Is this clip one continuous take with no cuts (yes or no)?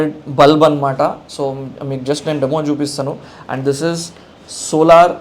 yes